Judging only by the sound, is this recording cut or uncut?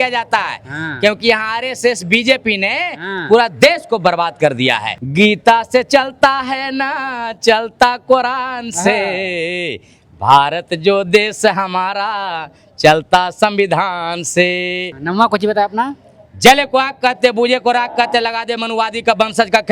cut